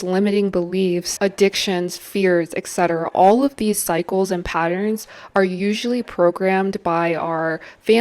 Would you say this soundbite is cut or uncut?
cut